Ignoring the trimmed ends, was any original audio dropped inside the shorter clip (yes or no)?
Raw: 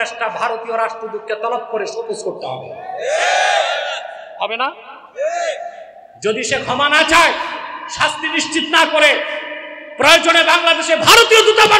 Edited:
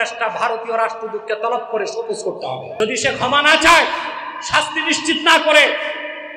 yes